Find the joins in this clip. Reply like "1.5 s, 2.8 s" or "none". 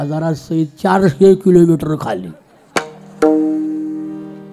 none